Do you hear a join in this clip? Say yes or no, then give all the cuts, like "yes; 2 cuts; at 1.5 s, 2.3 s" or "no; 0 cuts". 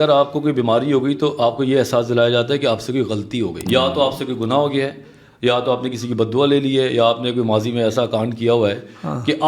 yes; 1 cut; at 3.6 s